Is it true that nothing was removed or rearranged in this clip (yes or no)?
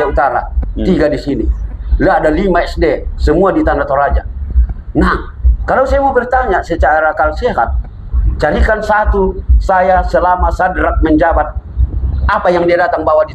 yes